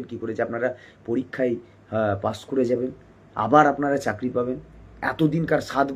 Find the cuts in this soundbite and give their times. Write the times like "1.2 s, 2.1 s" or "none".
none